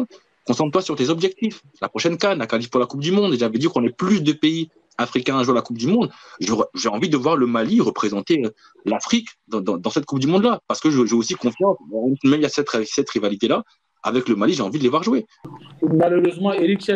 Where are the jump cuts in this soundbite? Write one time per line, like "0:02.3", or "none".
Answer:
0:15.6